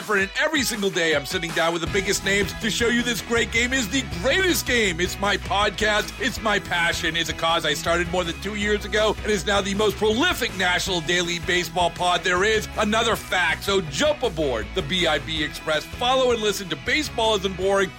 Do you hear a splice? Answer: no; 0 cuts

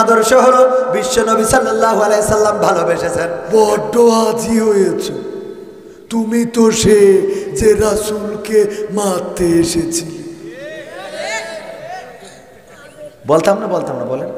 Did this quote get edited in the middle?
yes; 1 cut; at 3.3 s

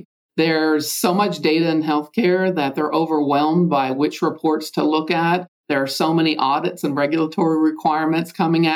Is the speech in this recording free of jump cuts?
yes; 0 cuts

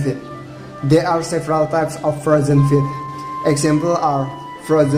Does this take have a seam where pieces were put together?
no; 0 cuts

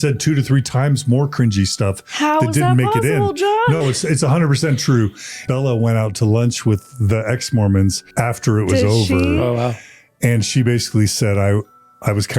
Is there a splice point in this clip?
yes; 2 cuts; at 5.4 s, 8.0 s

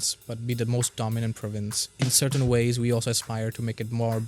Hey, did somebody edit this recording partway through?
yes; 1 cut; at 1.9 s

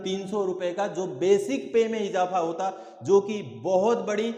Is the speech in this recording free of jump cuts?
yes; 0 cuts

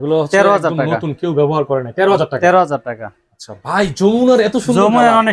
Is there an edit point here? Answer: no; 0 cuts

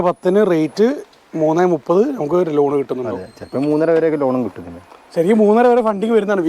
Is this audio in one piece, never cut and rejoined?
yes; 0 cuts

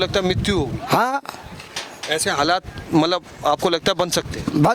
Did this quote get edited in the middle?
no; 0 cuts

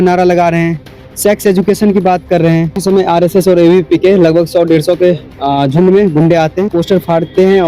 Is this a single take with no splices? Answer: no; 2 cuts; at 2.8 s, 6.7 s

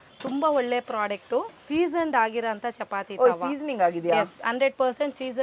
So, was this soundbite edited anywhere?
yes; 1 cut; at 1.6 s

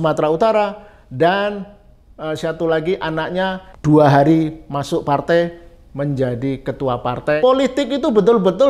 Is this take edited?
yes; 2 cuts; at 3.7 s, 7.4 s

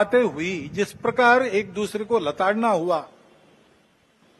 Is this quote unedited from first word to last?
yes; 0 cuts

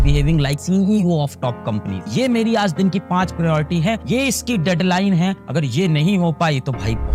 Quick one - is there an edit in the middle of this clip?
no; 0 cuts

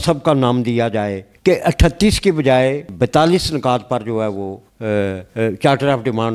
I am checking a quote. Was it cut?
no; 0 cuts

